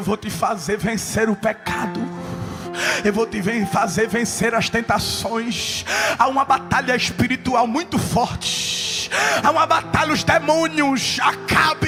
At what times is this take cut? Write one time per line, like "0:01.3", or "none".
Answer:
none